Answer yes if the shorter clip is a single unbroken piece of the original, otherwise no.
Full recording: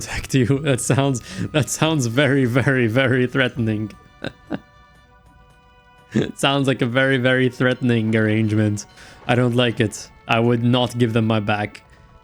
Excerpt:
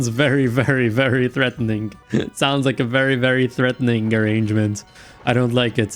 no